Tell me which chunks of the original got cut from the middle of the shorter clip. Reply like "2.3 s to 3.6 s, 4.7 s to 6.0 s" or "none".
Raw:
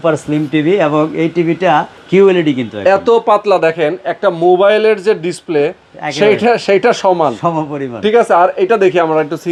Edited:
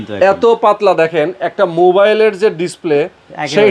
none